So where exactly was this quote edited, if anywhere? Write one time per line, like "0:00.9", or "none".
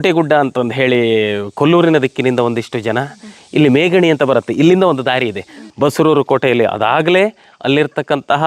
0:05.6